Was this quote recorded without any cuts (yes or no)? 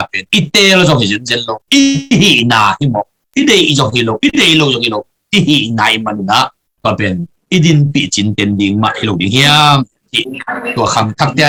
yes